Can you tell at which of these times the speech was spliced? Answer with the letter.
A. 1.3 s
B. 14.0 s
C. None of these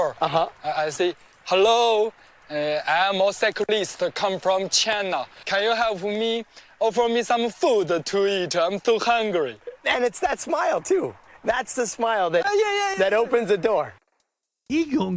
B